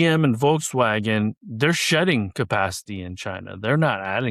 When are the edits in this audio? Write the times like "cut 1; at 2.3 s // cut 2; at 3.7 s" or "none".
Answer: none